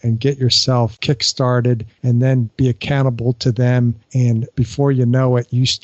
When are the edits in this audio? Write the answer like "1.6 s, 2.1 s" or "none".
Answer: 1.0 s, 2.3 s, 4.2 s